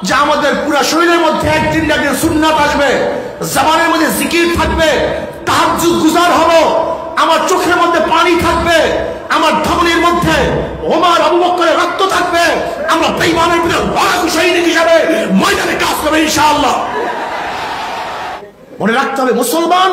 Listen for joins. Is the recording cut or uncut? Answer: cut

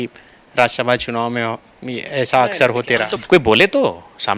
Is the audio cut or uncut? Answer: cut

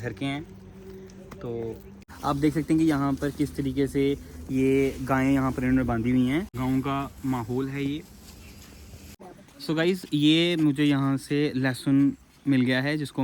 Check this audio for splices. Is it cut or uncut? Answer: cut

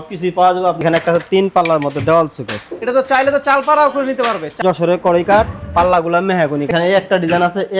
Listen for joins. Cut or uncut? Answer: cut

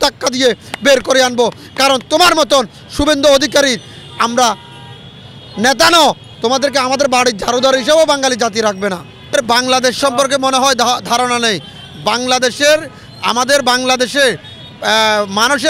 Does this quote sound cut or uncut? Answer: uncut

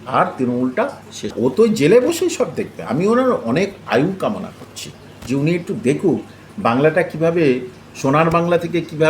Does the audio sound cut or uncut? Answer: cut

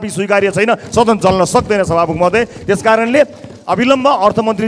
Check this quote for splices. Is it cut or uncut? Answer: uncut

